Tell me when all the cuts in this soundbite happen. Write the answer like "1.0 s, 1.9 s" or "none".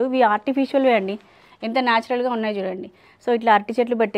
none